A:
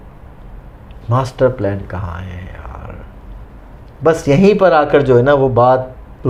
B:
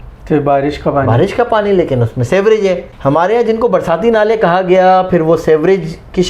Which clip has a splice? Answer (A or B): B